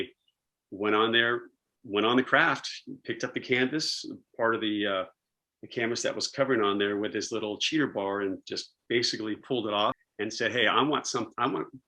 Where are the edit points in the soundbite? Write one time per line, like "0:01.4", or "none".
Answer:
0:10.1